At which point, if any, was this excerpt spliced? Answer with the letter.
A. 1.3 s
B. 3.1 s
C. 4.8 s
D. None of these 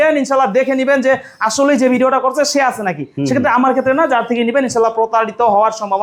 D